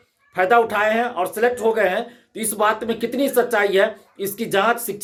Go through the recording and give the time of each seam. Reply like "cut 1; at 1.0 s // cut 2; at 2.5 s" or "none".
none